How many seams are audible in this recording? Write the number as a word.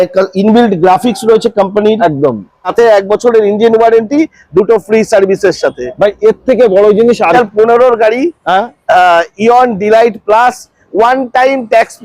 two